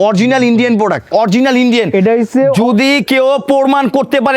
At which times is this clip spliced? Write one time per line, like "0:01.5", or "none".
0:01.1